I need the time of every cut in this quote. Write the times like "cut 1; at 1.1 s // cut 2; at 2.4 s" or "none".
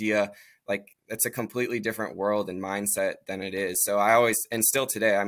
none